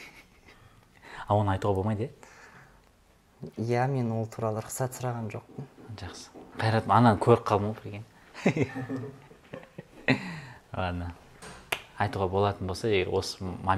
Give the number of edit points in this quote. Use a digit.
0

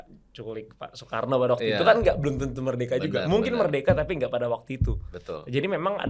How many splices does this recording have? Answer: 0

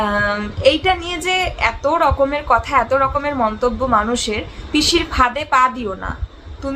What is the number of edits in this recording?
1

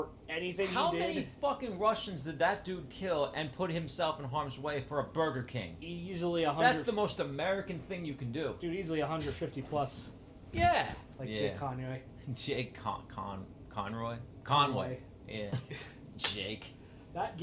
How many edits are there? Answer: 2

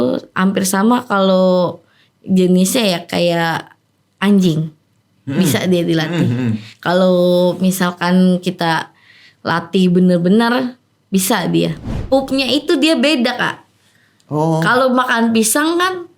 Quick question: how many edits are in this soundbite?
1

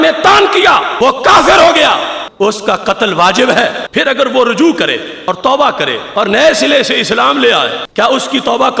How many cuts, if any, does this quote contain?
6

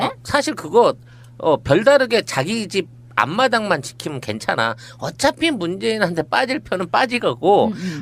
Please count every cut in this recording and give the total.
1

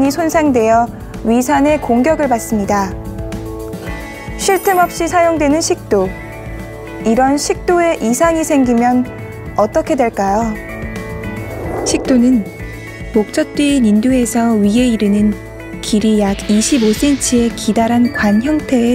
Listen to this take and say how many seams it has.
0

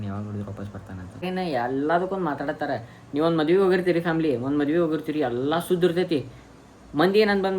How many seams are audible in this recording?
1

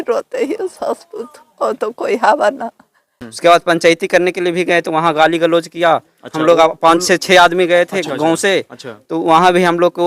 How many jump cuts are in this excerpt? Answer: 1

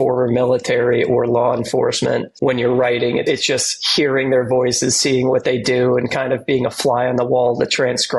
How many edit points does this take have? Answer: 2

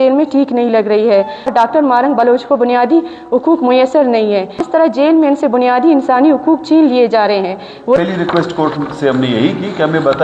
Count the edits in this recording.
3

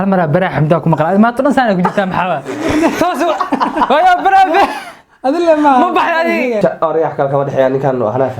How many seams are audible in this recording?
1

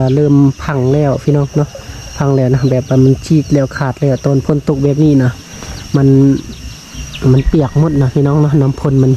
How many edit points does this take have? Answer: 0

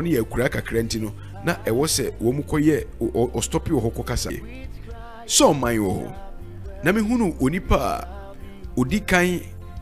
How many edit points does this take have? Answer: 1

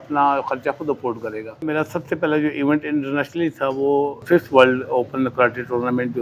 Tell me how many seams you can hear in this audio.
2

